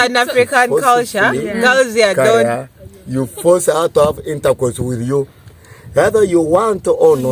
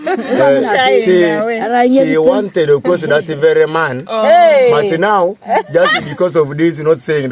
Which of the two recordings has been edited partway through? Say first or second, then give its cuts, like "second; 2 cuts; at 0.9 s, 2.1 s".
first; 1 cut; at 2.4 s